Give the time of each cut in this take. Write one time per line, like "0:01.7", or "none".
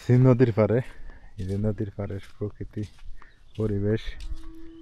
none